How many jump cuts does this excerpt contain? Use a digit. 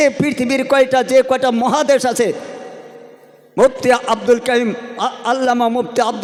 0